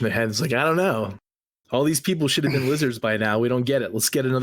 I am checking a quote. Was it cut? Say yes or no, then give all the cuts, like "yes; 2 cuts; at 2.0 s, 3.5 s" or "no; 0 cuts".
no; 0 cuts